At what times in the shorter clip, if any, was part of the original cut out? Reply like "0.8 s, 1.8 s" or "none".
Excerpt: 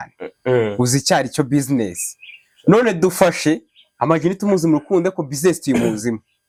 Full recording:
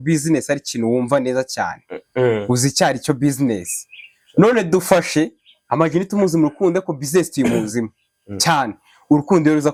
none